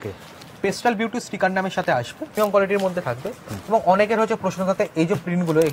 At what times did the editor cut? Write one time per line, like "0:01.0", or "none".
0:02.4